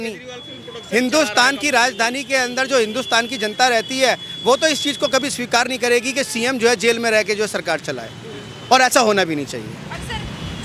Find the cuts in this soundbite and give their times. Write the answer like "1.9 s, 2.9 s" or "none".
none